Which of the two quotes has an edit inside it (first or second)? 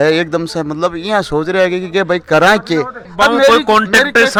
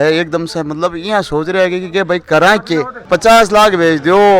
second